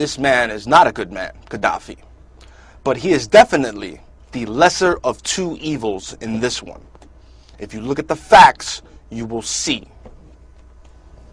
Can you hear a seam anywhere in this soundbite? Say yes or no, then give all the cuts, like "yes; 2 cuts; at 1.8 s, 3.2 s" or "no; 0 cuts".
no; 0 cuts